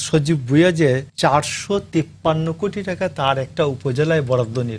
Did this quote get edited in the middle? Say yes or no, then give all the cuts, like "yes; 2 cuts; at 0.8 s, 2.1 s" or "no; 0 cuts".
yes; 1 cut; at 1.1 s